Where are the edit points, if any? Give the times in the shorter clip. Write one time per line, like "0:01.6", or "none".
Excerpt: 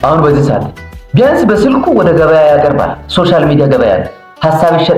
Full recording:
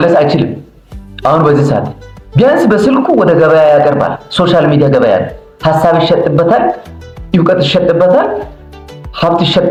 none